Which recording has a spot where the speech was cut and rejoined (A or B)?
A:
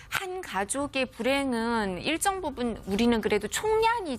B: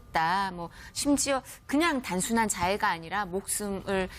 B